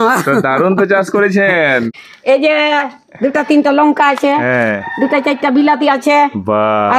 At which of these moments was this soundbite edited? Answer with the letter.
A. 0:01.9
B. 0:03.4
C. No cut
A